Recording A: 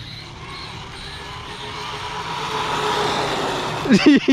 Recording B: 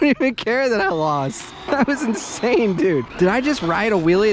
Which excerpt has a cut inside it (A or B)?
B